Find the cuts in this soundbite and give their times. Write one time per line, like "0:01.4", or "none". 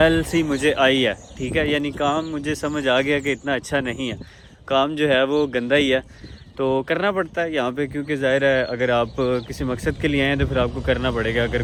none